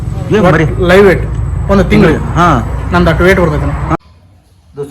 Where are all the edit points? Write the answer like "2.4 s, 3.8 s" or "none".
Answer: 4.0 s